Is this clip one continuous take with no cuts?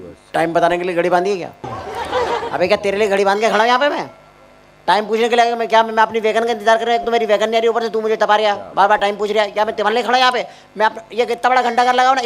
yes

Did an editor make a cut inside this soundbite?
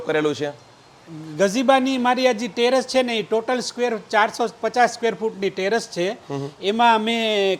no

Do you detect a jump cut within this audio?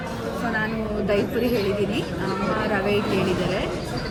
no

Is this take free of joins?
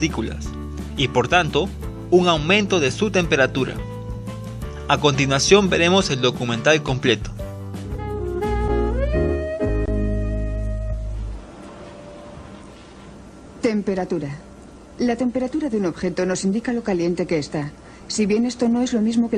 no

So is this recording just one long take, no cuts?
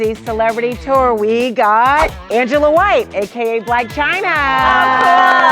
yes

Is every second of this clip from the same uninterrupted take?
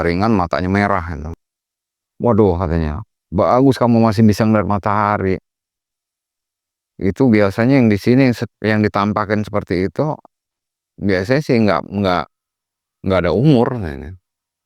no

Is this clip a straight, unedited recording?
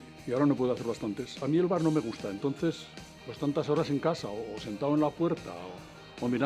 no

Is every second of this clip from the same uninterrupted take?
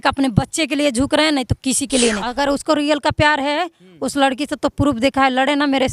no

